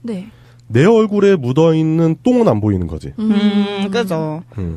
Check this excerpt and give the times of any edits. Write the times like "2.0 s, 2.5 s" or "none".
2.6 s